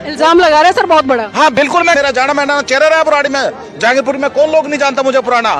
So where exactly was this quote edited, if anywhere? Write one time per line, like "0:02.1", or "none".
0:02.0